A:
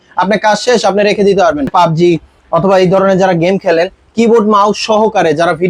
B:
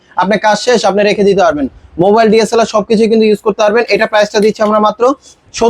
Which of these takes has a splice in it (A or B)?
A